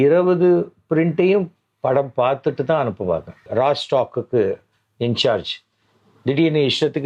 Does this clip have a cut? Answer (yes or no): yes